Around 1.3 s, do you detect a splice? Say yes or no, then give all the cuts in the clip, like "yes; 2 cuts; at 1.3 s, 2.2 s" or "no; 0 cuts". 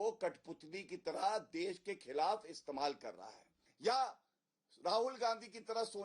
no; 1 cut; at 3.6 s